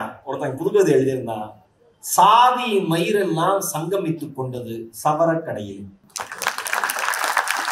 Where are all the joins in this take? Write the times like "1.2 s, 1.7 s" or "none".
6.0 s

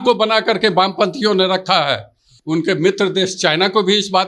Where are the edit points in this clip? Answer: 2.3 s

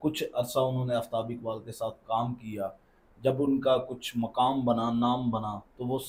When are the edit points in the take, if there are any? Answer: none

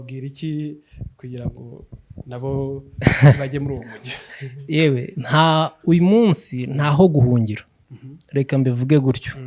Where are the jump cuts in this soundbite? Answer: none

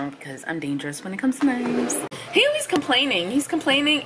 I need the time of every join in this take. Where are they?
2.2 s

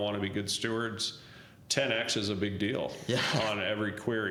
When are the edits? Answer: none

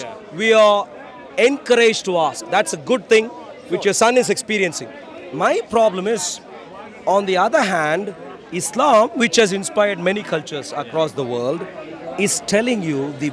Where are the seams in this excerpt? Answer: none

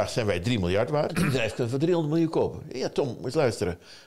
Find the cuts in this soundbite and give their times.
1.1 s

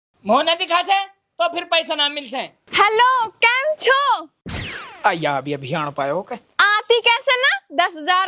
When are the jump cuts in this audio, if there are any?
2.6 s

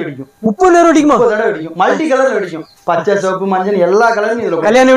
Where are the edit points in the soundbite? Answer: none

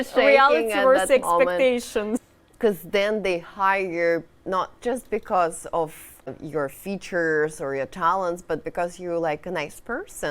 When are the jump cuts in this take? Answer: 2.2 s, 6.4 s

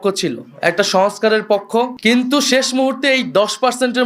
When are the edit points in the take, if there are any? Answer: 1.9 s

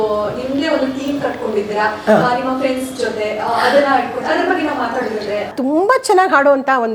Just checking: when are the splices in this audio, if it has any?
5.5 s

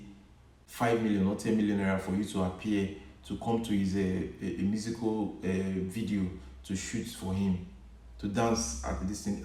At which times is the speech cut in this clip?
none

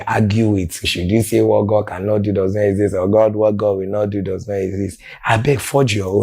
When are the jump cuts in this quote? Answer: 0.9 s, 5.2 s

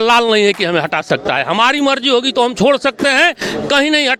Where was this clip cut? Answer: none

